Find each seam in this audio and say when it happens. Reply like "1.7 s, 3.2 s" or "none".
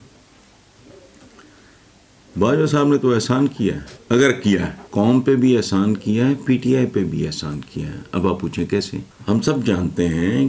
3.9 s, 4.8 s, 9.1 s